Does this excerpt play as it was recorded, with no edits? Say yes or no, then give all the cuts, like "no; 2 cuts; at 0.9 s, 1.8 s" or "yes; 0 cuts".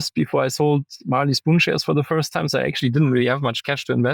yes; 0 cuts